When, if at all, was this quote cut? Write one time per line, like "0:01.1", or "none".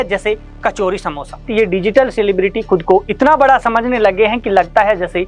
0:01.5